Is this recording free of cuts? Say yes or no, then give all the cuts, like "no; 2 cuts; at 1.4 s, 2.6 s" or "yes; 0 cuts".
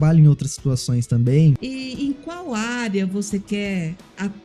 no; 1 cut; at 1.6 s